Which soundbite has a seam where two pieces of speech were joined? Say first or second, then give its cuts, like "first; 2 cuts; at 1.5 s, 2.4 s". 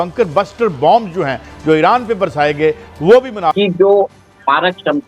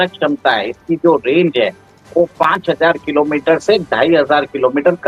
first; 1 cut; at 3.5 s